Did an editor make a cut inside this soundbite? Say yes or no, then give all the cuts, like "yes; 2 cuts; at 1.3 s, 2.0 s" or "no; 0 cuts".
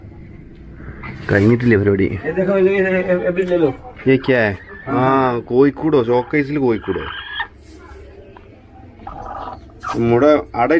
no; 0 cuts